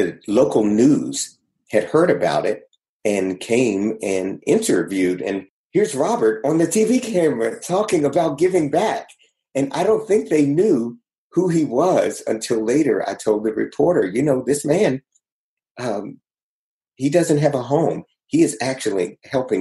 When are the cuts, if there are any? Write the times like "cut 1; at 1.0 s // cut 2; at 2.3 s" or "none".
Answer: cut 1; at 5.5 s